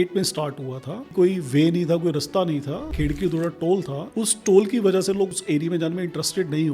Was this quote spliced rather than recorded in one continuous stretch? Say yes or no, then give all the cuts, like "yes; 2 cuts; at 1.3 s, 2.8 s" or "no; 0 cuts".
yes; 4 cuts; at 1.1 s, 2.9 s, 4.0 s, 5.3 s